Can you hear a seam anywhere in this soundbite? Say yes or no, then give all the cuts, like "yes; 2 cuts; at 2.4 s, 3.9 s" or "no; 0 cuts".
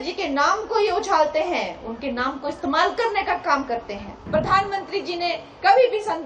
yes; 1 cut; at 4.2 s